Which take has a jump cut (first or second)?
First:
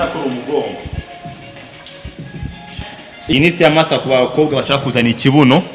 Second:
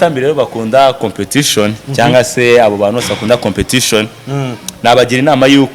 first